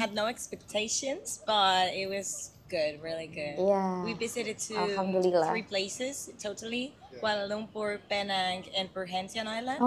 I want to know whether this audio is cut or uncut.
uncut